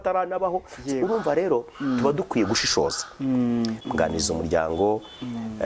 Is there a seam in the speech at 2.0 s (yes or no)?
no